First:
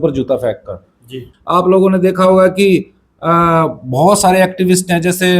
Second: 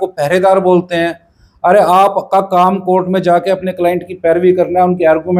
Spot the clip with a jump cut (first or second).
first